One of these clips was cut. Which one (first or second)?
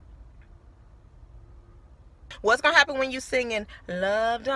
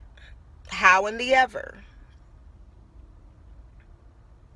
first